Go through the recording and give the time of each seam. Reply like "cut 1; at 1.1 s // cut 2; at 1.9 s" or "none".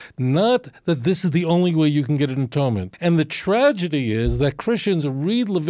cut 1; at 2.9 s